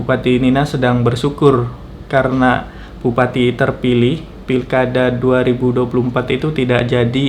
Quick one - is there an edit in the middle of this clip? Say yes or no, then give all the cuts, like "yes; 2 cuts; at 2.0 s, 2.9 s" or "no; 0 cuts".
no; 0 cuts